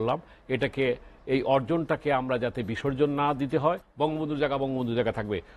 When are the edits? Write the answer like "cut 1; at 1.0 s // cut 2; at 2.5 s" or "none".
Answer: cut 1; at 3.9 s